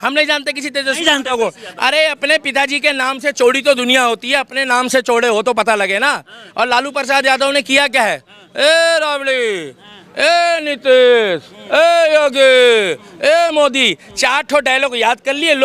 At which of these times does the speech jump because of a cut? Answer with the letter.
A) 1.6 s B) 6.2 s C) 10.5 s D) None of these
D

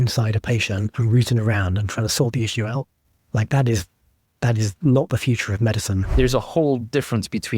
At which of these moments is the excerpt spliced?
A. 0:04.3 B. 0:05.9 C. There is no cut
B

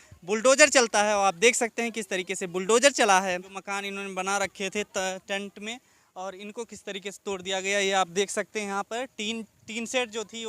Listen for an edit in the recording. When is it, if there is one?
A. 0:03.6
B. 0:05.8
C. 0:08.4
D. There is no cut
A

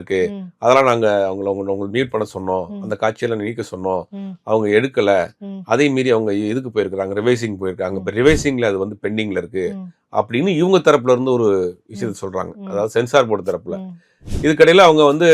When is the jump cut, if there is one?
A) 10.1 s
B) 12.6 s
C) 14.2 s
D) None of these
C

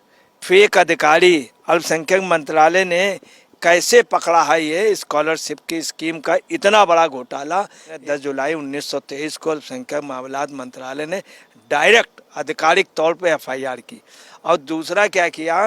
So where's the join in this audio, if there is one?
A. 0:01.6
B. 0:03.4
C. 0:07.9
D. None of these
C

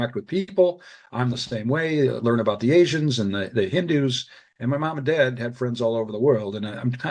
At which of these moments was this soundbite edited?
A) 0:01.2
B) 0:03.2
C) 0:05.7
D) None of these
D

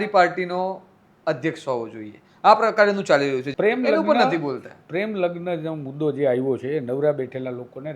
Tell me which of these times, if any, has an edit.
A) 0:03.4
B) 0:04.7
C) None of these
A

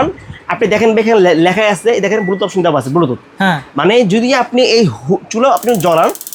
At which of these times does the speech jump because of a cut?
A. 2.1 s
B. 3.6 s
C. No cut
C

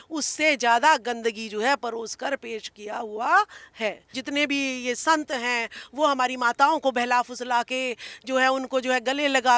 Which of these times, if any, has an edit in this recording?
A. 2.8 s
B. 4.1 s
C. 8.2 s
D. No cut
B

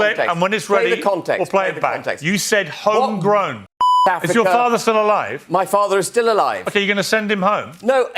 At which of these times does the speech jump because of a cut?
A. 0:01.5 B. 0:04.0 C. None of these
B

